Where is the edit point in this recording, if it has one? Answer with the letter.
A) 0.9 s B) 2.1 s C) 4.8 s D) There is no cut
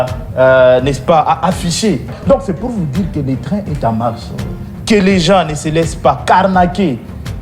B